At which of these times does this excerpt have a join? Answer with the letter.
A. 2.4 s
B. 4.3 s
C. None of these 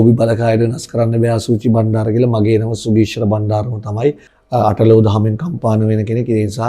B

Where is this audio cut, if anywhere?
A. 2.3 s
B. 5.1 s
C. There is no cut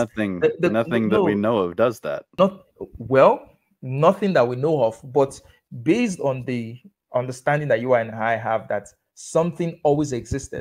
A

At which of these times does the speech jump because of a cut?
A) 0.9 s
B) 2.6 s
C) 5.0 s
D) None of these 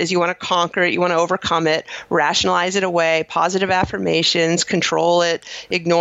D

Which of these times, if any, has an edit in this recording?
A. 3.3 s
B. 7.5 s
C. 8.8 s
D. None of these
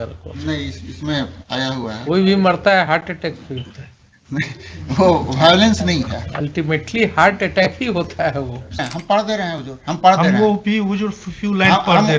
C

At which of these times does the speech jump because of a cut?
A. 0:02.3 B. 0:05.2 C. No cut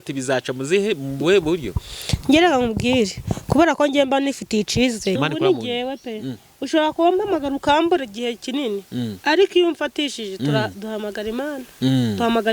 B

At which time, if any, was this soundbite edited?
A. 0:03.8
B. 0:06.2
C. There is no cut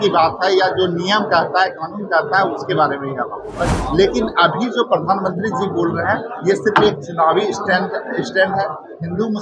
A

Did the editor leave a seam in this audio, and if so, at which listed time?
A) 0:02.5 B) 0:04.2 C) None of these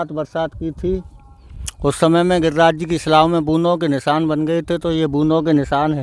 C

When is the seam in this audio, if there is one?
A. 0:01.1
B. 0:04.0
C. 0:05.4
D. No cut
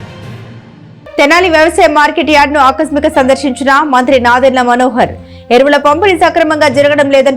A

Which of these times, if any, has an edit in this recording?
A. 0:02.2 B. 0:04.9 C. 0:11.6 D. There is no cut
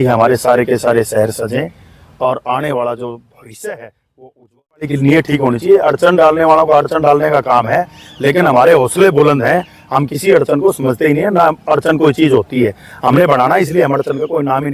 B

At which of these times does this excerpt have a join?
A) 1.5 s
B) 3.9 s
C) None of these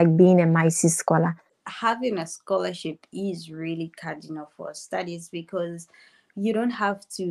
A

